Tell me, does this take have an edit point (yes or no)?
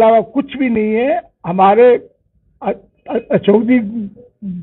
no